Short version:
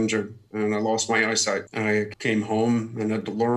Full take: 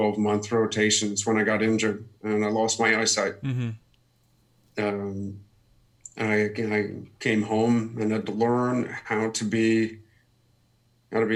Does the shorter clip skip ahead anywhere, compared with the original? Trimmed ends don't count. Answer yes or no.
yes